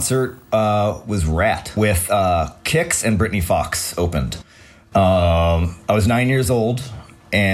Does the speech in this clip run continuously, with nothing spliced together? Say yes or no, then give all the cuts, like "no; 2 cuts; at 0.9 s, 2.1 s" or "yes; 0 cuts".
no; 1 cut; at 1.8 s